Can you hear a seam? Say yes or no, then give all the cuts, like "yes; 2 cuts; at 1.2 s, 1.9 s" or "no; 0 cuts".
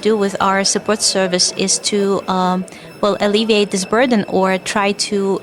no; 0 cuts